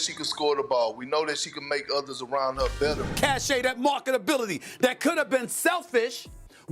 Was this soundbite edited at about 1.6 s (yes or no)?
no